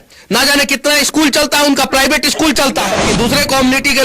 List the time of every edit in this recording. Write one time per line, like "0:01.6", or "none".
0:03.1